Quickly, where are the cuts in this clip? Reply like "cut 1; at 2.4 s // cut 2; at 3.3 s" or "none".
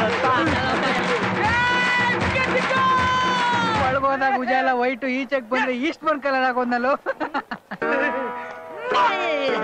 cut 1; at 1.0 s